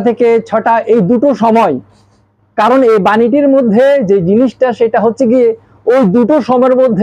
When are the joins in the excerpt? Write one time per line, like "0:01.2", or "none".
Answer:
none